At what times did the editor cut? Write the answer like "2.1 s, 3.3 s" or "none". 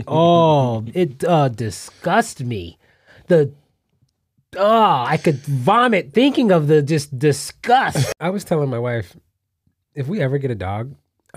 8.1 s